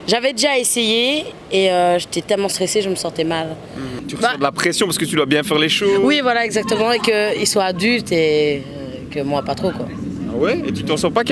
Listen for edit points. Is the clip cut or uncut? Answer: cut